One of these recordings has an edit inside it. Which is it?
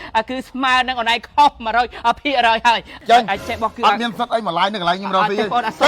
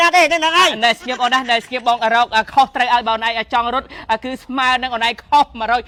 first; 1 cut; at 2.9 s

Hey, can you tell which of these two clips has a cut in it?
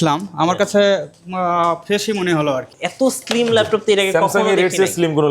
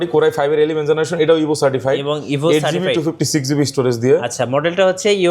first; 1 cut; at 2.8 s

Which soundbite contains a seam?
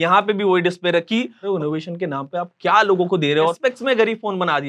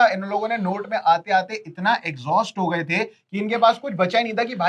first; 2 cuts; at 1.4 s, 3.6 s

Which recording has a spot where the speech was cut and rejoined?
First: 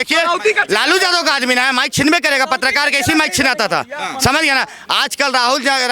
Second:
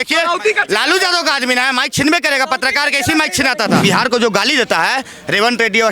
second; 1 cut; at 3.8 s

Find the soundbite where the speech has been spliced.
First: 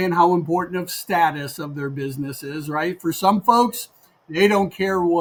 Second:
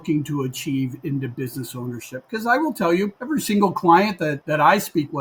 second; 2 cuts; at 3.2 s, 4.4 s

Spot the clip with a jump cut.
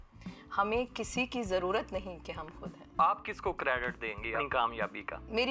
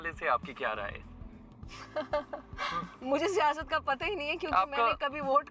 first; 2 cuts; at 3.0 s, 4.4 s

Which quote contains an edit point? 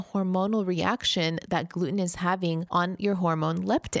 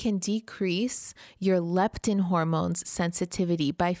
first; 1 cut; at 2.6 s

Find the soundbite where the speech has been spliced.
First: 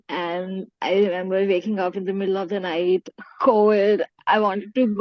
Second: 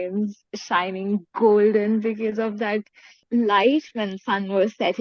second; 1 cut; at 3.3 s

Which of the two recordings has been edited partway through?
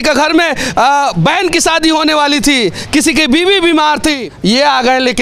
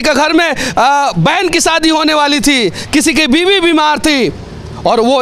first; 1 cut; at 4.3 s

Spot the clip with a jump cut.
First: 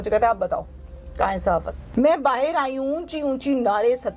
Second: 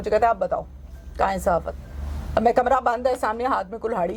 first; 1 cut; at 1.8 s

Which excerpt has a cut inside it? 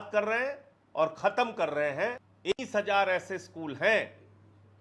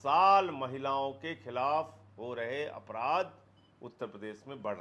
first; 1 cut; at 2.3 s

